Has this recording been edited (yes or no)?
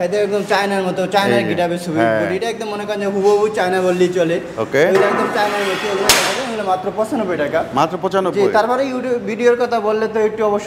no